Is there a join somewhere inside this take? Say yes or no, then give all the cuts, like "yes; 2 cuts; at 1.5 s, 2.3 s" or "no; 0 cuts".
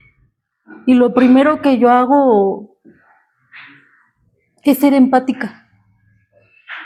no; 0 cuts